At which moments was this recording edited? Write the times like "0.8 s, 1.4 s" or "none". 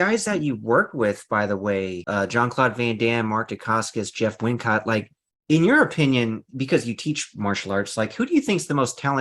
2.0 s